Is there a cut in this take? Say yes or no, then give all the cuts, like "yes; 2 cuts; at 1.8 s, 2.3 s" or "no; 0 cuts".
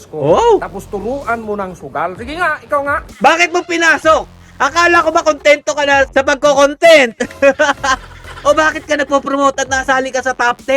yes; 3 cuts; at 3.0 s, 4.4 s, 8.2 s